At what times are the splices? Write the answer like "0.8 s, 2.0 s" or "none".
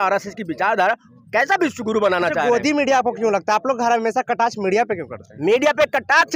none